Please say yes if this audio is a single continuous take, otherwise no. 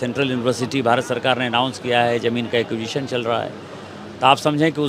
yes